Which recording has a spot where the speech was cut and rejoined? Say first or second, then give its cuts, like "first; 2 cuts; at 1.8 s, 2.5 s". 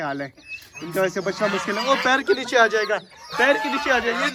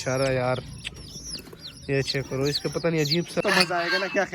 second; 1 cut; at 3.4 s